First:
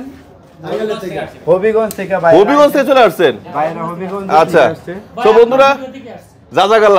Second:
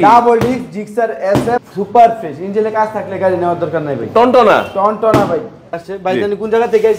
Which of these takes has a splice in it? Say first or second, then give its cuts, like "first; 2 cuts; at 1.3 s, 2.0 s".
second; 2 cuts; at 1.6 s, 5.7 s